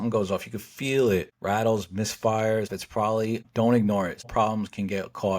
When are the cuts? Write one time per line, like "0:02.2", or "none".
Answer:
0:01.3
0:02.9
0:04.3